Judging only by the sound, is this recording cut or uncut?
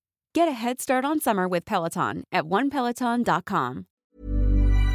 cut